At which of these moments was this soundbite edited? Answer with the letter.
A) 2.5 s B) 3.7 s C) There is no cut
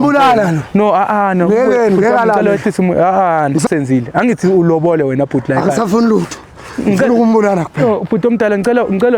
B